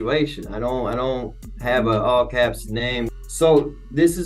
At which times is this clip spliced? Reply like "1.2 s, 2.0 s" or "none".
1.4 s, 3.1 s